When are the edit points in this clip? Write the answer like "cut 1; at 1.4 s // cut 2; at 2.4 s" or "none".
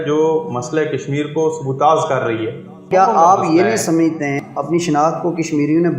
cut 1; at 2.9 s // cut 2; at 4.4 s

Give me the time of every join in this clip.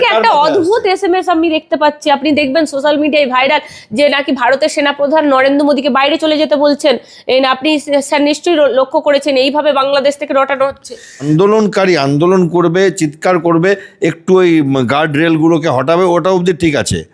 cut 1; at 11.2 s

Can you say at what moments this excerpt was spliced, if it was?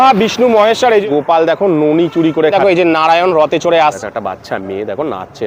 cut 1; at 1.0 s // cut 2; at 2.5 s // cut 3; at 4.0 s

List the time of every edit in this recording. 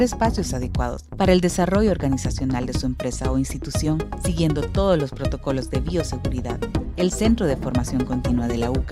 none

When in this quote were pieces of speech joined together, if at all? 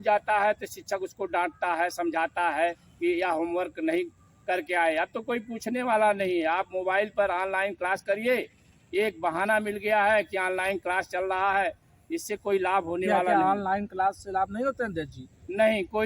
none

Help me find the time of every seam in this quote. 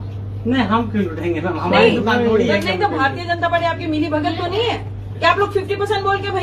none

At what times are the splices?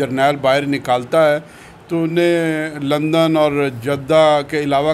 none

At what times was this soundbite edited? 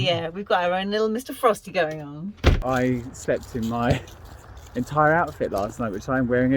cut 1; at 2.6 s

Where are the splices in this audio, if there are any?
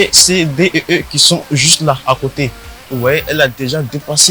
none

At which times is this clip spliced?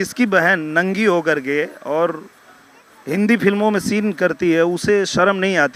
none

